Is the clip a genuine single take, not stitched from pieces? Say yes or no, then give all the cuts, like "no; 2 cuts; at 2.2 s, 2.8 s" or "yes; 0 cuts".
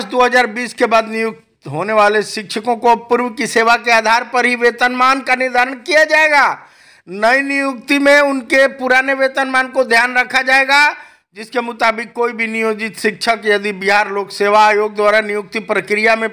yes; 0 cuts